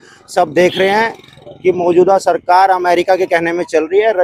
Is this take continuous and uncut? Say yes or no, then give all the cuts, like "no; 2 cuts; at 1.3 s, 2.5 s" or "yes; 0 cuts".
yes; 0 cuts